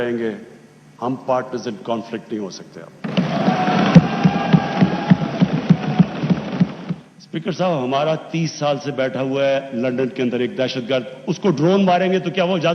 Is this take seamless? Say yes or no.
no